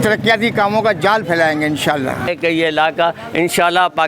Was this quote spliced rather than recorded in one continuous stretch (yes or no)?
yes